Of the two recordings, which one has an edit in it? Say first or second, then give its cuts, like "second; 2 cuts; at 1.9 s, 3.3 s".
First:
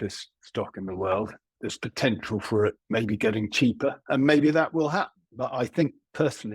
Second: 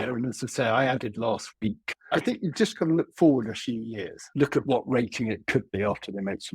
second; 1 cut; at 1.9 s